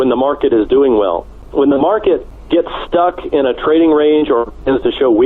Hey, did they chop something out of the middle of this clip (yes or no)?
yes